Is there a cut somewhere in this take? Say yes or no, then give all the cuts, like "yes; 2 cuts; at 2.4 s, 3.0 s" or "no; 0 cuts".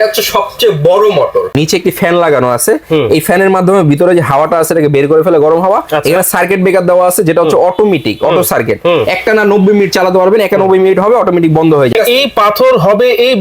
yes; 2 cuts; at 1.5 s, 11.9 s